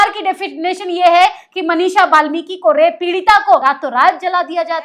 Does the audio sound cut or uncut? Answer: cut